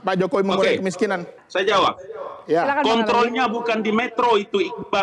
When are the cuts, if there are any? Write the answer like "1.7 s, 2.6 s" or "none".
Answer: 1.4 s